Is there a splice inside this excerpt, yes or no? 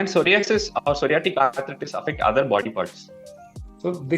no